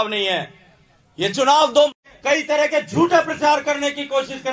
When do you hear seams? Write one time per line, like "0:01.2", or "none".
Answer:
0:01.9

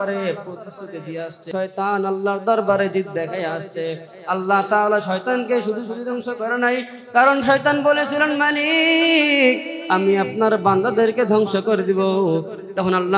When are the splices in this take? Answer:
0:01.5

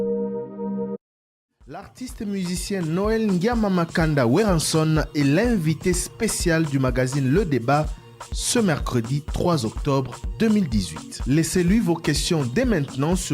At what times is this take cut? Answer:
0:01.0

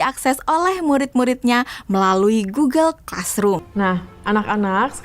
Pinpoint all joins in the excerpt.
0:03.7

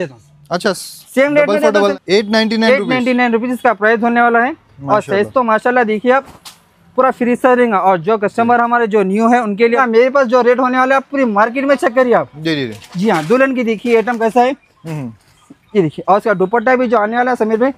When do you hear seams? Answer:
0:01.9
0:09.8

